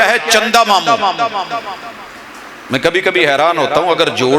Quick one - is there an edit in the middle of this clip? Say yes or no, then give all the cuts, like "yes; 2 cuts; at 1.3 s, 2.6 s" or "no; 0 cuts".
no; 0 cuts